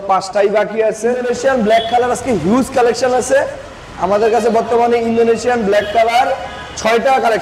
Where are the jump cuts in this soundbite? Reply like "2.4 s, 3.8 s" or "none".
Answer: 1.2 s

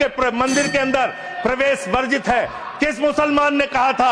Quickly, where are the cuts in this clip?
none

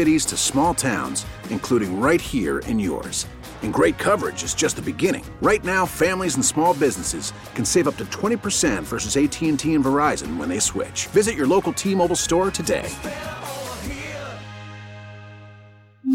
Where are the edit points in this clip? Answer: none

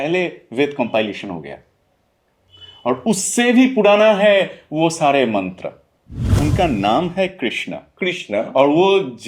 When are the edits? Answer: 6.4 s

